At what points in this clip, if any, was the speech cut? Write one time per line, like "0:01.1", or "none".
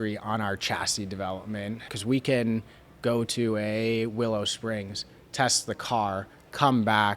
0:01.9